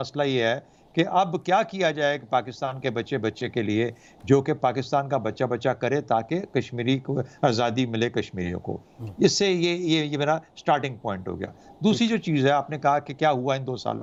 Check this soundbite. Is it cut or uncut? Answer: uncut